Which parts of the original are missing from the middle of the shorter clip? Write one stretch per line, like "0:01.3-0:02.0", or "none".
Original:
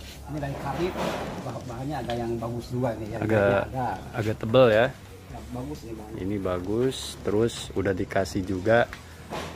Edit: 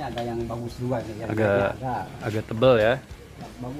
none